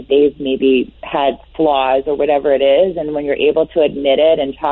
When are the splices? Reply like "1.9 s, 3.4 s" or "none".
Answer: none